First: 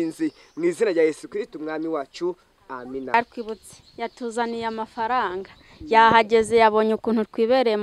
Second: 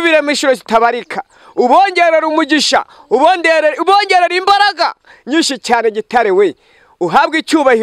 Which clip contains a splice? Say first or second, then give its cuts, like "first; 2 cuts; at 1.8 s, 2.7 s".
first; 1 cut; at 3.1 s